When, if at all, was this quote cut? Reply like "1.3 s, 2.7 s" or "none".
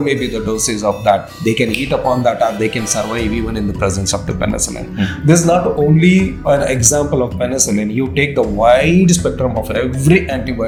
none